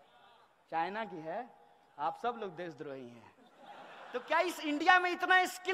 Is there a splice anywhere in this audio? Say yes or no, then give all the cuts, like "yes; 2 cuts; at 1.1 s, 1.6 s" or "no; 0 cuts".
yes; 1 cut; at 4.0 s